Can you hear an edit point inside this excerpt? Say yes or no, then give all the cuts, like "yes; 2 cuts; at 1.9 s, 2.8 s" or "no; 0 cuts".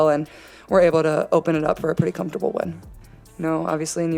yes; 1 cut; at 2.9 s